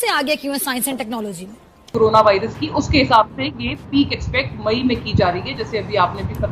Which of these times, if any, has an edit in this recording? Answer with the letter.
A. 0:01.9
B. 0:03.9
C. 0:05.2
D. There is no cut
A